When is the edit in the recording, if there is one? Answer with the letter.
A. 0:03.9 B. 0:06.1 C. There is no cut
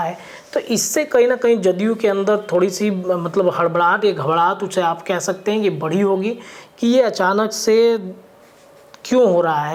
C